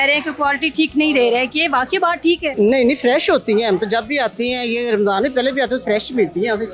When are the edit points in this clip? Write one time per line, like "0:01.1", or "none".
none